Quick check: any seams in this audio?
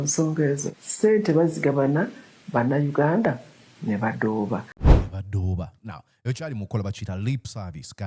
yes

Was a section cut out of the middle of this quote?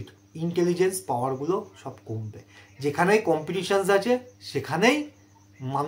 no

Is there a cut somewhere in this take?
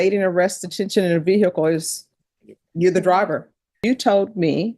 yes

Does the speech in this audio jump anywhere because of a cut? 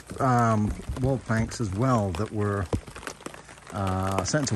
no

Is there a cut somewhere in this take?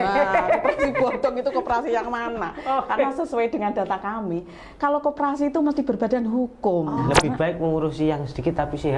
yes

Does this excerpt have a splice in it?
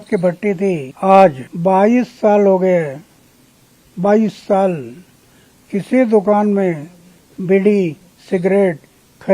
yes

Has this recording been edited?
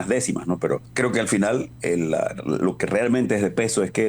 yes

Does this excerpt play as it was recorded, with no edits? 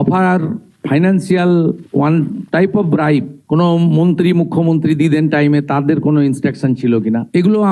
yes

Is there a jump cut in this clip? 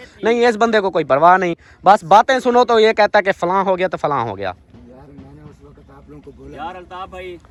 no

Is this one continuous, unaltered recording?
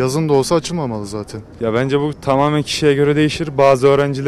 no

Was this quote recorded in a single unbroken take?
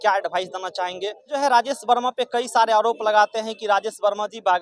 no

